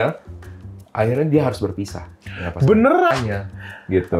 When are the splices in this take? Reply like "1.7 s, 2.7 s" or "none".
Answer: 3.1 s